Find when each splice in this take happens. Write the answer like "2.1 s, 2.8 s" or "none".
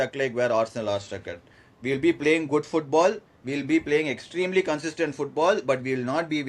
none

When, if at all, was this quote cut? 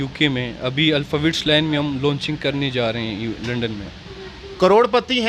4.0 s

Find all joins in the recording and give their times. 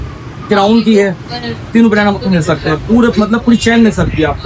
none

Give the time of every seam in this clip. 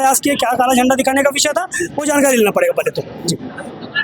none

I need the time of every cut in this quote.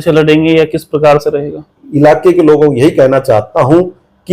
1.8 s

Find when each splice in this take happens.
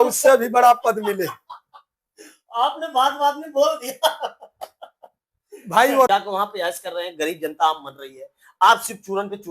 6.1 s

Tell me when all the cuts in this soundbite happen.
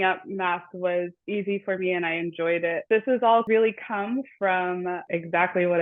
1.2 s, 2.8 s, 3.4 s, 5.0 s

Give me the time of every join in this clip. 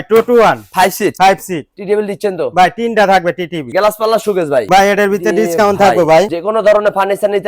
3.7 s, 6.3 s

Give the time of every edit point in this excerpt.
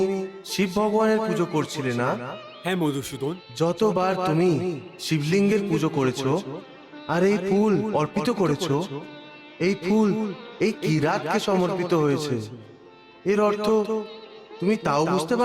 3.4 s

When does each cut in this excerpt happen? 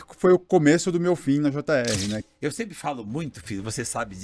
2.2 s

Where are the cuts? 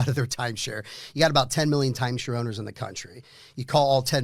none

